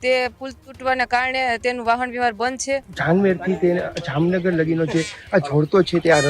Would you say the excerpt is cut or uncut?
cut